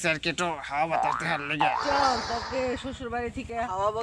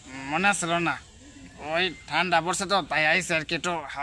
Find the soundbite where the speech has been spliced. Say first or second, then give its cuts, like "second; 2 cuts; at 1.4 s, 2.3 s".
first; 1 cut; at 1.8 s